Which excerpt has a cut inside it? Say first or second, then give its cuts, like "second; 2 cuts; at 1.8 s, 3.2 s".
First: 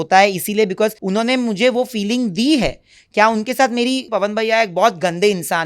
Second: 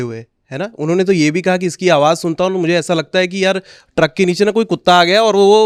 first; 2 cuts; at 1.0 s, 4.1 s